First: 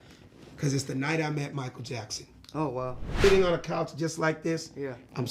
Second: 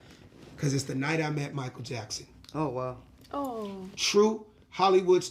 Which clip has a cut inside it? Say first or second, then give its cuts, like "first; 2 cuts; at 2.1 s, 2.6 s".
first; 1 cut; at 3.2 s